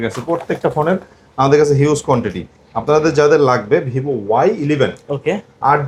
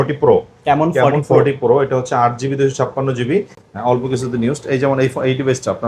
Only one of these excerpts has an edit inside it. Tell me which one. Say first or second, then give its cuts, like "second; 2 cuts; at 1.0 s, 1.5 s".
second; 1 cut; at 3.6 s